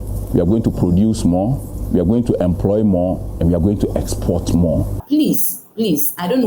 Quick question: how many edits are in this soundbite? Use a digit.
1